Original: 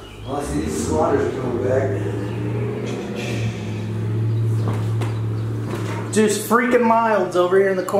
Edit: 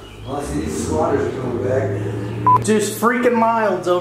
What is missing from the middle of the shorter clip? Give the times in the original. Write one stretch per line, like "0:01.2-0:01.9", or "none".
0:02.6-0:06.1